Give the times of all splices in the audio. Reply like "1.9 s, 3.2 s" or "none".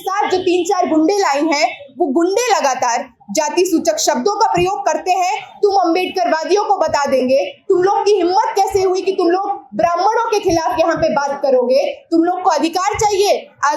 none